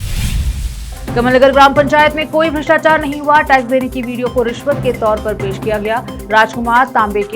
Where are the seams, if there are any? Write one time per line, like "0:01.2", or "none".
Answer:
0:00.9

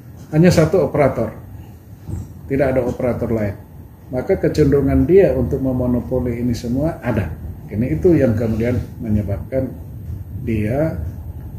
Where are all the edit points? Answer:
0:07.9

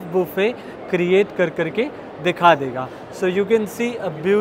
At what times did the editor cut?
none

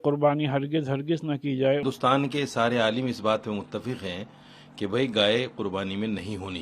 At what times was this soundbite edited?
0:01.8

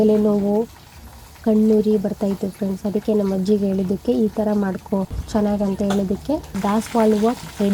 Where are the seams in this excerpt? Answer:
0:06.6

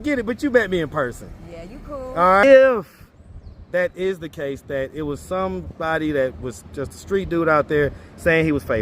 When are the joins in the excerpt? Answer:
0:02.4

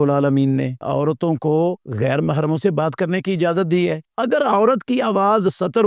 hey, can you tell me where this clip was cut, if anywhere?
0:00.8
0:01.9
0:04.0

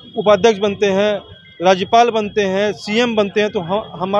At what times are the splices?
none

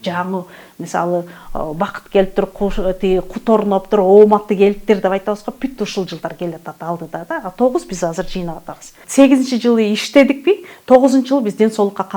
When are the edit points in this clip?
0:09.0

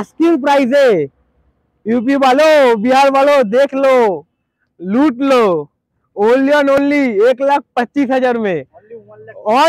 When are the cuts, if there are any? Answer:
none

